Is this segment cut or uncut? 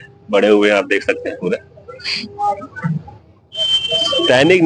uncut